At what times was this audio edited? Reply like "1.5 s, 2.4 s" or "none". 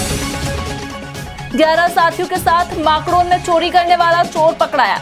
none